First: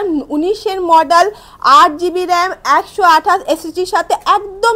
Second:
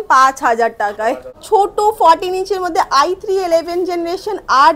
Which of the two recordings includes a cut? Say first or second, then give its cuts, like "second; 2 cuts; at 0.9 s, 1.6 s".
second; 1 cut; at 1.3 s